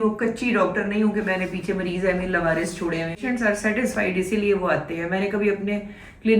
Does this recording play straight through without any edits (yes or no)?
no